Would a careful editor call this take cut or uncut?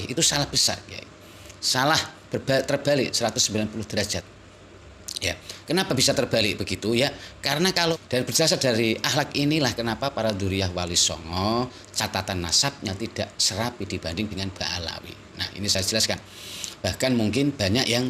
cut